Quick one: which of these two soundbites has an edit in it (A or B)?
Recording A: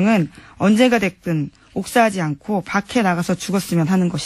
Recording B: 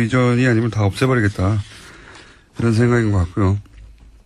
A